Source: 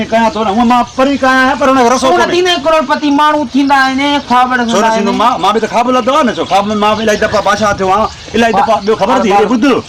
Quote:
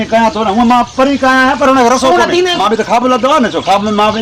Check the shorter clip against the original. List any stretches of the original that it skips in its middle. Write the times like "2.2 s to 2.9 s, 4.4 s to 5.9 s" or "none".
2.6 s to 5.4 s